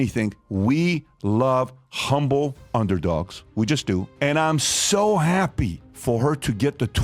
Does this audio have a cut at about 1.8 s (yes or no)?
no